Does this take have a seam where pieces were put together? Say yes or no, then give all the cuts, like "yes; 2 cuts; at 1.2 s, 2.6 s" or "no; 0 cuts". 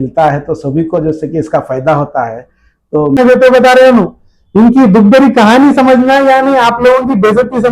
yes; 1 cut; at 3.2 s